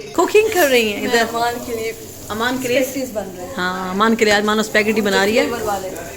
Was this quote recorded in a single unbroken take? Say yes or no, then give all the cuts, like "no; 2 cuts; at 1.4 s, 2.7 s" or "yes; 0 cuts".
yes; 0 cuts